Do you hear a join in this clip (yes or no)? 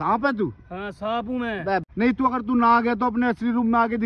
yes